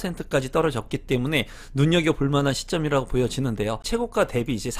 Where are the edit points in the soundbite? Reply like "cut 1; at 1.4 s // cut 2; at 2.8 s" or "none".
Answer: cut 1; at 3.8 s

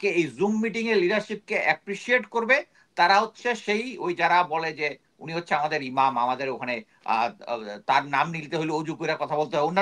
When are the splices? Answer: none

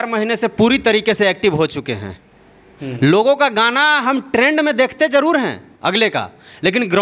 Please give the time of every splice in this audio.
none

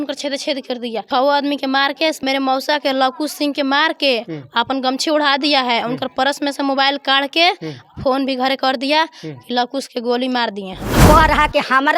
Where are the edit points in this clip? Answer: cut 1; at 1.0 s // cut 2; at 2.2 s // cut 3; at 10.9 s

